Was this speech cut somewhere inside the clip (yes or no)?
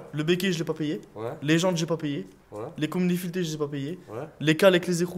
no